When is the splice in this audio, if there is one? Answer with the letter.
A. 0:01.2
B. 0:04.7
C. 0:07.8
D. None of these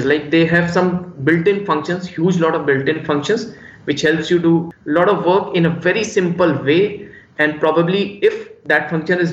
B